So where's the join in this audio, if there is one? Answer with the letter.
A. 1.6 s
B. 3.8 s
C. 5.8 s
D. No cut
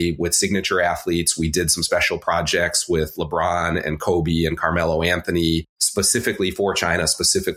C